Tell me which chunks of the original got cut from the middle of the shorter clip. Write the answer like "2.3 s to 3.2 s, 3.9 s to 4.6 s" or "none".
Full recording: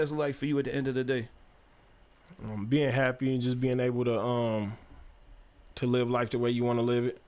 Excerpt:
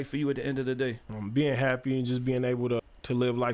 1.4 s to 2.4 s, 4.2 s to 5.5 s